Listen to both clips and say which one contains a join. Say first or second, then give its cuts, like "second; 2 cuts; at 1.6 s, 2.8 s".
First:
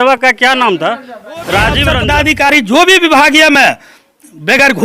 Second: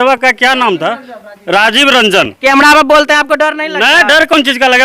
first; 1 cut; at 1.9 s